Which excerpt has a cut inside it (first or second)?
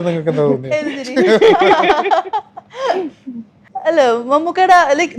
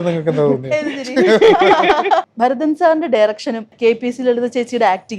second